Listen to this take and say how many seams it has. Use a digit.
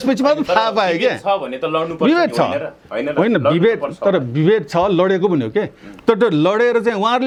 0